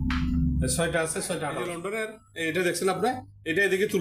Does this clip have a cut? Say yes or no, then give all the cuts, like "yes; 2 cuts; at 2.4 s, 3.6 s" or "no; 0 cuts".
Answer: yes; 1 cut; at 1.7 s